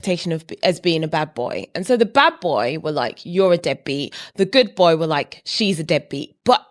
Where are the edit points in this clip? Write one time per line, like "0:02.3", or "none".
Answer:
none